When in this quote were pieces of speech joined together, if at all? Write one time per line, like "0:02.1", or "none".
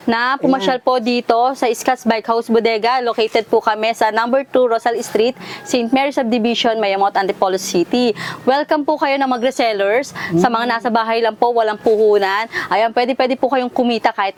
none